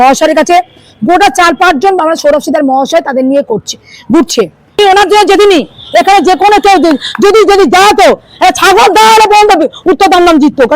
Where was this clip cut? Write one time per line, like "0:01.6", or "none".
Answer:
0:04.8